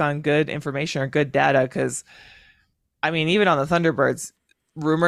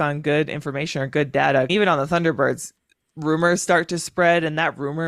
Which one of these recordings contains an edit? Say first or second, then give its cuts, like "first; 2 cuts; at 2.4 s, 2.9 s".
second; 1 cut; at 1.7 s